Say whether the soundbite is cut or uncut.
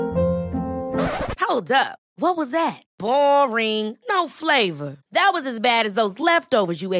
uncut